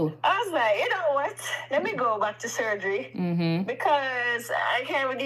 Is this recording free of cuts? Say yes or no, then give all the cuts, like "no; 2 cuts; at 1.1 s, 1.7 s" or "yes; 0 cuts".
yes; 0 cuts